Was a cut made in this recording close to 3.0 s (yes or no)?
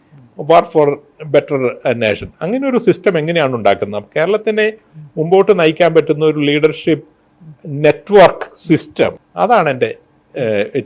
no